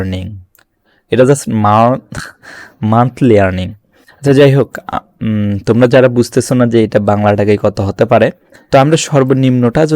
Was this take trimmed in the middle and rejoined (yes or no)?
yes